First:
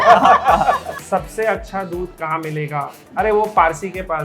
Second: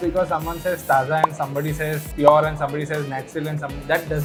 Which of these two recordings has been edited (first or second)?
first